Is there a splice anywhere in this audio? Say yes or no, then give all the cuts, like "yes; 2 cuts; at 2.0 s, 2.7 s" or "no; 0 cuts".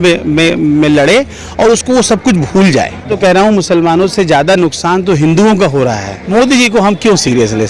yes; 2 cuts; at 3.1 s, 6.1 s